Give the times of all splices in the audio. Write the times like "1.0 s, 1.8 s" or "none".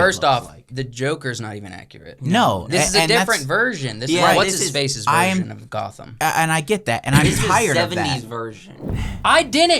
8.9 s